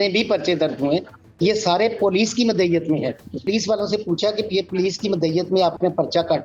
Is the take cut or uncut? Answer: cut